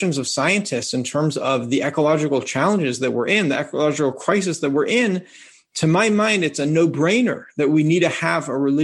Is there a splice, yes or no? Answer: no